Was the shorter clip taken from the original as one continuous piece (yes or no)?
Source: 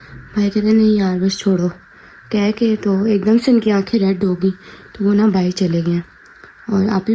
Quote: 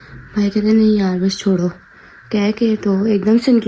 yes